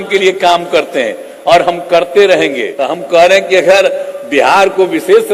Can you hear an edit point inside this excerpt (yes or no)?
yes